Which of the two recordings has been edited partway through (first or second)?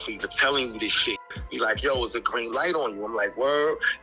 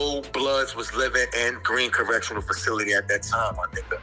first